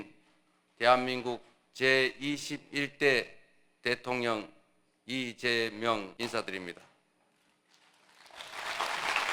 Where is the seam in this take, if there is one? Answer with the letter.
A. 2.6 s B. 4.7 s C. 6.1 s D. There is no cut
C